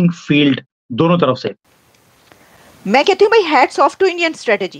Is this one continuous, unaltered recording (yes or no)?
no